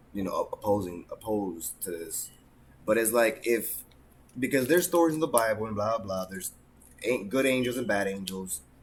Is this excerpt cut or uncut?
uncut